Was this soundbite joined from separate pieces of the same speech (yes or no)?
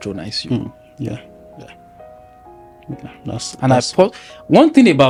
no